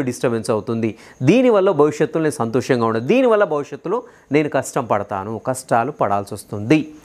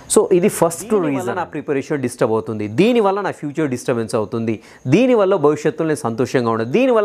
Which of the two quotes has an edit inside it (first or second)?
second